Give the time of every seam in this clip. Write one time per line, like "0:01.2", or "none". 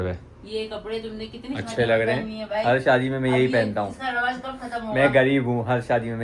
0:02.4